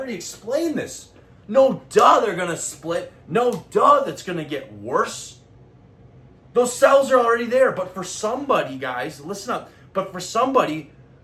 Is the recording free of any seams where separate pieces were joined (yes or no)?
yes